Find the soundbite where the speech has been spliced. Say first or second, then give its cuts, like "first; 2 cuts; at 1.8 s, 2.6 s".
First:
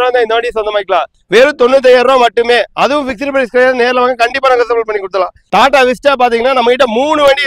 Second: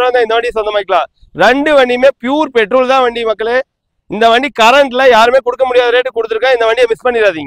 first; 2 cuts; at 1.2 s, 5.4 s